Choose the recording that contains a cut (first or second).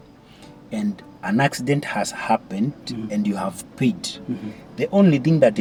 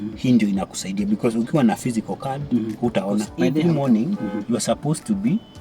second